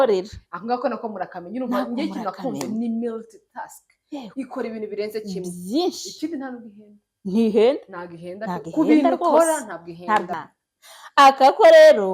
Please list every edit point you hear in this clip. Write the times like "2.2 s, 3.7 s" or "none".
10.4 s